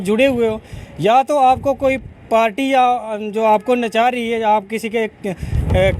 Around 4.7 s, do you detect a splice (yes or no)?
no